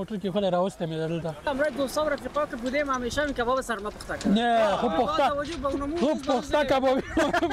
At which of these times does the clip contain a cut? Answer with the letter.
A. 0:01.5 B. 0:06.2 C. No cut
A